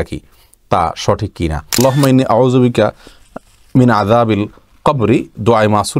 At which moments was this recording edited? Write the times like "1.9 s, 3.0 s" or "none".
1.8 s